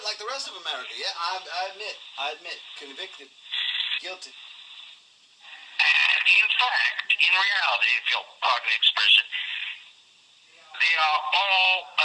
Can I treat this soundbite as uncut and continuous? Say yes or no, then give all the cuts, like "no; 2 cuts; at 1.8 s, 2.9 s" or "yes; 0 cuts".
no; 1 cut; at 6.1 s